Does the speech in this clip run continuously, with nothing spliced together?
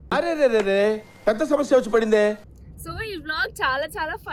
yes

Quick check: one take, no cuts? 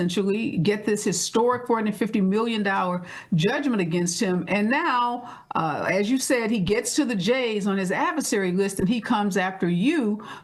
yes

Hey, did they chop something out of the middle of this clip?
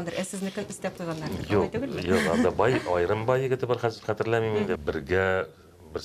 yes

